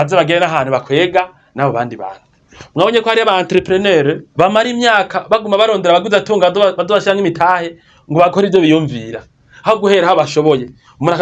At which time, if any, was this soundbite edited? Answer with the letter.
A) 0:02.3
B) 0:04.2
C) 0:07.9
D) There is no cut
B